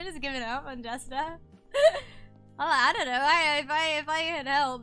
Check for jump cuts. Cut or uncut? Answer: uncut